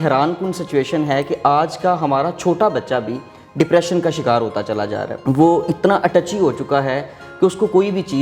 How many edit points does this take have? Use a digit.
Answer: 1